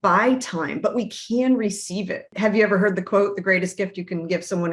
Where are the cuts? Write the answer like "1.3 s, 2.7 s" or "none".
2.3 s